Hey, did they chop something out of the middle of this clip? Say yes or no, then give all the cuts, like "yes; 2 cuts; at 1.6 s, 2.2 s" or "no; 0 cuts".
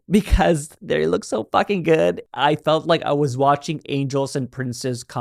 yes; 1 cut; at 2.2 s